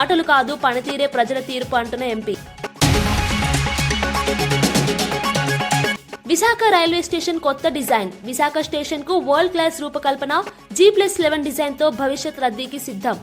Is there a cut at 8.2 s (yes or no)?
no